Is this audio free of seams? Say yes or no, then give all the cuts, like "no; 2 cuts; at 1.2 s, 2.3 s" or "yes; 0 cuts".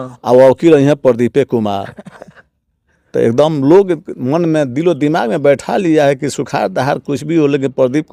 yes; 0 cuts